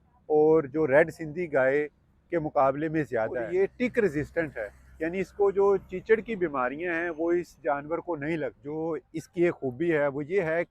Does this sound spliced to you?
yes; 2 cuts; at 3.4 s, 8.6 s

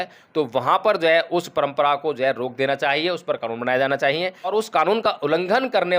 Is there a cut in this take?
yes; 1 cut; at 4.5 s

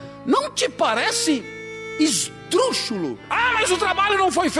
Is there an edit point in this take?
yes; 1 cut; at 3.2 s

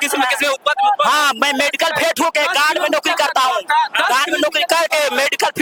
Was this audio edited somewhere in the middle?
no; 0 cuts

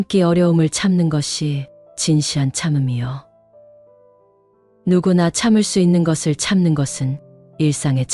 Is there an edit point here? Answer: no; 0 cuts

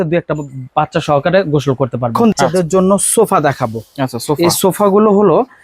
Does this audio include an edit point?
yes; 1 cut; at 2.1 s

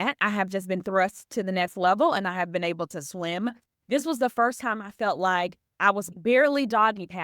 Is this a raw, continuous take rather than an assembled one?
no; 1 cut; at 6.1 s

